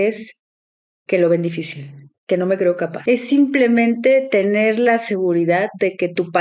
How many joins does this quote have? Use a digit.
1